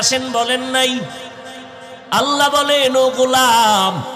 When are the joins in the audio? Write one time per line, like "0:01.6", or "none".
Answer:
none